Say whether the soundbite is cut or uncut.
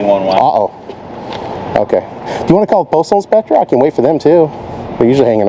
uncut